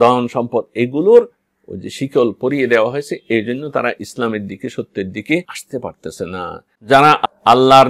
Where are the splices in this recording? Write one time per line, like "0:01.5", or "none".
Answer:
0:06.7